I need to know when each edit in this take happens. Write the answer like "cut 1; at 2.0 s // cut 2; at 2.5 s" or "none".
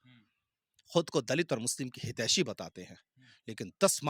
none